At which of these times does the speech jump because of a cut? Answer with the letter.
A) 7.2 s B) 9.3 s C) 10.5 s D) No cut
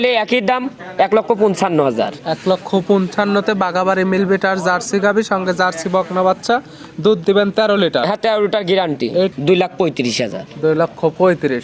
B